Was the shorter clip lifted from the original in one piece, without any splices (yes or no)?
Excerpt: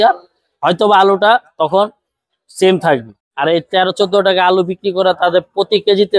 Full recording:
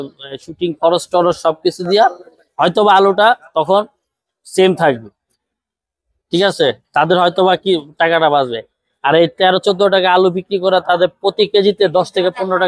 no